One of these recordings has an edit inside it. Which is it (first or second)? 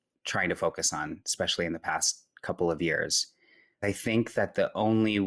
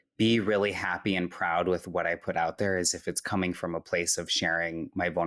first